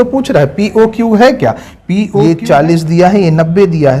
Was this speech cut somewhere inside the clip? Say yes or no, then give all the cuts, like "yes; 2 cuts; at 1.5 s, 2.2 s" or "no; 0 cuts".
yes; 1 cut; at 2.2 s